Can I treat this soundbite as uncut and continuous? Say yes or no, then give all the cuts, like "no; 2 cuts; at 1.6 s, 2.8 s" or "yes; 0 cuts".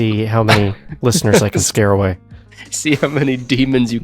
yes; 0 cuts